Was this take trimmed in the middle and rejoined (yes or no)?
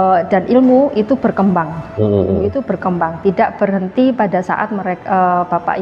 no